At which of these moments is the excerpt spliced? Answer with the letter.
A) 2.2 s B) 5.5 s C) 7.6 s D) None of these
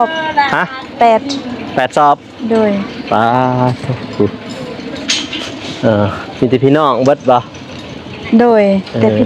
D